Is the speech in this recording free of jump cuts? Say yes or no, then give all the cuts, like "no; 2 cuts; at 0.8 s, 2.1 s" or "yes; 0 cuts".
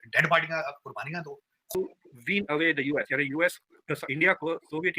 no; 1 cut; at 1.8 s